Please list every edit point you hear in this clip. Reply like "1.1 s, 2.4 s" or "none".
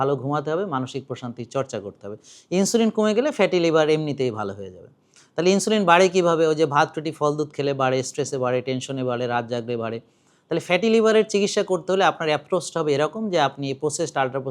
none